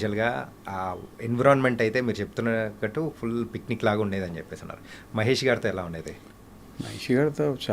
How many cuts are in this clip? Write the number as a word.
zero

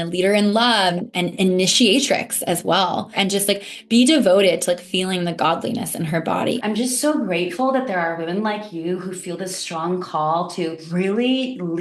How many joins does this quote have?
four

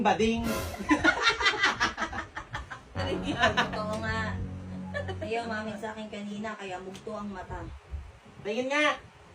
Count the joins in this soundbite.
one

